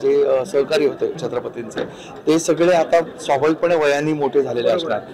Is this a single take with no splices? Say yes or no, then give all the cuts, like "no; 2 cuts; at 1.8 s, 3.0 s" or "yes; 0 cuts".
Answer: yes; 0 cuts